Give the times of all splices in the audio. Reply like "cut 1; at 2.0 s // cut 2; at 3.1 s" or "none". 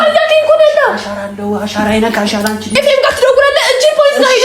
cut 1; at 2.6 s